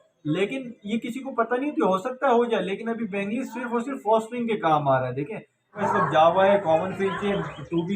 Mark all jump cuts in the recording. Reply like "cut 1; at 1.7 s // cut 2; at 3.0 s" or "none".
cut 1; at 5.8 s